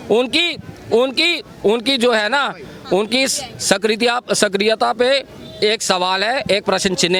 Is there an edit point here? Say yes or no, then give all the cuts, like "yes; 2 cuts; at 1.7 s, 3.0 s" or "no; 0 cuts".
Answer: no; 0 cuts